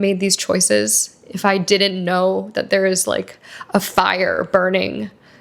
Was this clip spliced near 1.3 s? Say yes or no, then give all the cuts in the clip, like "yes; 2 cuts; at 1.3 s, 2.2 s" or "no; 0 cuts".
no; 0 cuts